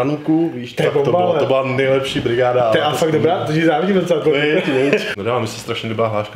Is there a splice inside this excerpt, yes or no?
yes